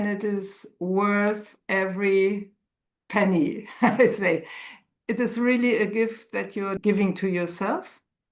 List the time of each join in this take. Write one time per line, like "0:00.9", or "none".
0:06.8